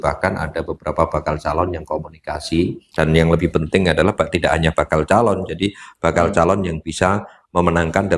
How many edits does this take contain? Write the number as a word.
one